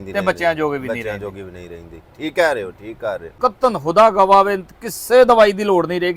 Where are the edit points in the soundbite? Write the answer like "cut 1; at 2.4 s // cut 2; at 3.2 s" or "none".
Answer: cut 1; at 3.3 s